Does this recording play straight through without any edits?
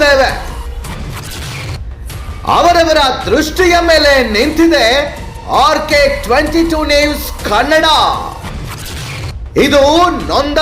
yes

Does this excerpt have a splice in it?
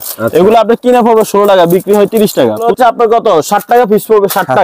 yes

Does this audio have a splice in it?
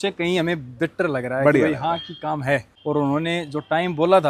yes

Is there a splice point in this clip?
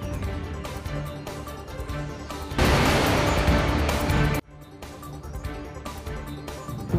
no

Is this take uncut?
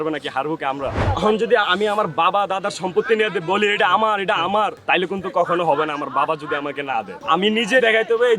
no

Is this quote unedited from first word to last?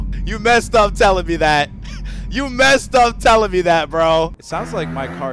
no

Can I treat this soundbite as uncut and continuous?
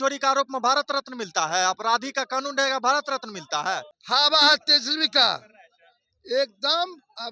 no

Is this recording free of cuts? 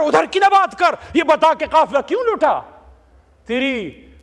yes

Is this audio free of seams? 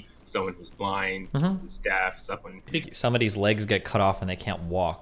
no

